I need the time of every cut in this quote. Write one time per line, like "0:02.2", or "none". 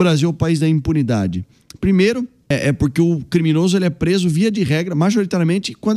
0:02.5